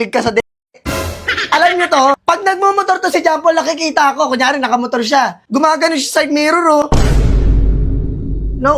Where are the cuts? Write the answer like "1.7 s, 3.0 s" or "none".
2.2 s, 5.4 s